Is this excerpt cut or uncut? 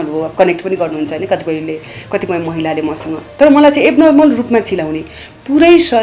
uncut